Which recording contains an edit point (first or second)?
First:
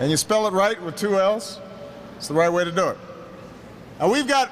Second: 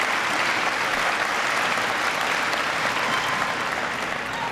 second